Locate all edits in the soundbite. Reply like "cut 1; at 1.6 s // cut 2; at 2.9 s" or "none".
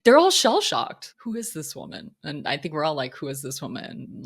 cut 1; at 1.0 s